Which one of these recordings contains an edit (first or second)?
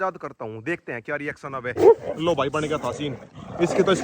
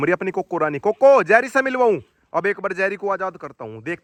first